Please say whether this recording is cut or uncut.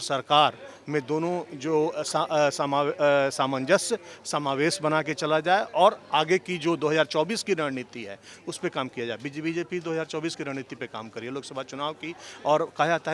uncut